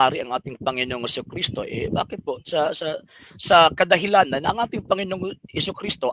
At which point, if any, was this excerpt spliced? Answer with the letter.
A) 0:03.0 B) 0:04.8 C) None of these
C